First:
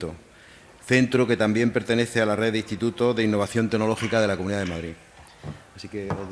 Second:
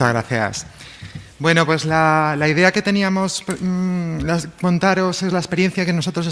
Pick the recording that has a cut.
first; 1 cut; at 1.0 s

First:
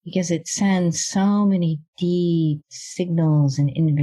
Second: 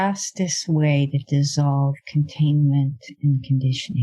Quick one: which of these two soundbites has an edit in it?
first; 1 cut; at 2.8 s

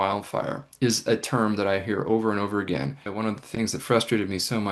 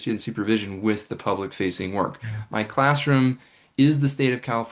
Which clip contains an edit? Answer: first; 1 cut; at 3.1 s

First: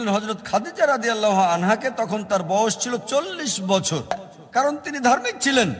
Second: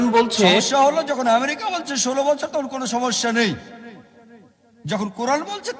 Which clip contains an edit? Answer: first; 1 cut; at 4.3 s

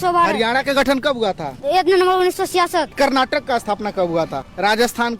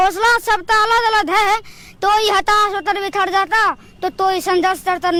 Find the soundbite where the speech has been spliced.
first; 3 cuts; at 1.6 s, 2.9 s, 4.4 s

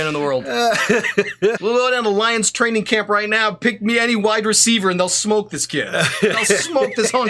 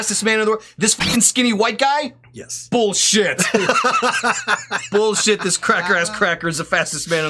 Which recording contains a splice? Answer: first; 1 cut; at 1.6 s

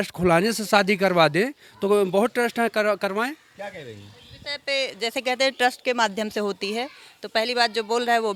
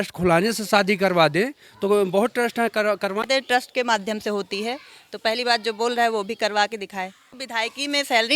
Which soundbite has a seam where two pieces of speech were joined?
second; 2 cuts; at 3.3 s, 7.3 s

